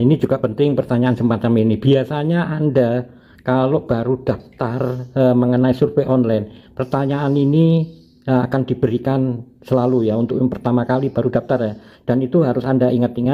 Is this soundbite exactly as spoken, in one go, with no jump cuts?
yes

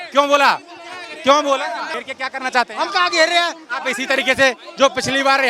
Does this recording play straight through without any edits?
yes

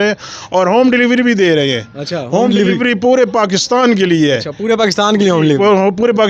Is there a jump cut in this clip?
no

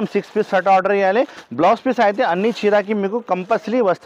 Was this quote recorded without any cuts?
yes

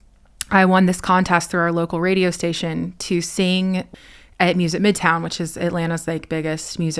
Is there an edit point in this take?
yes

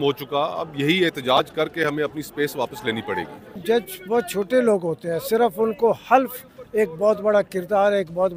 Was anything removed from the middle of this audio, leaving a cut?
yes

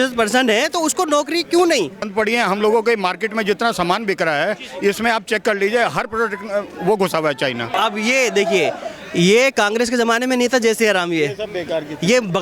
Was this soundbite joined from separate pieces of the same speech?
yes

